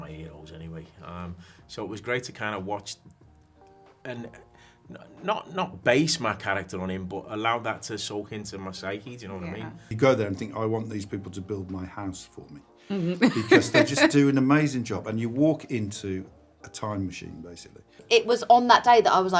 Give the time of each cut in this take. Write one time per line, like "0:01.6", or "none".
0:09.9
0:18.0